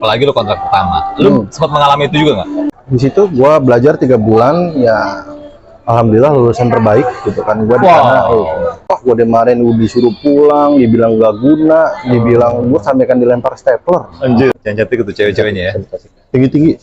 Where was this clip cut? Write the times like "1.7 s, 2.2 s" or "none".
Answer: 2.8 s, 9.0 s, 14.5 s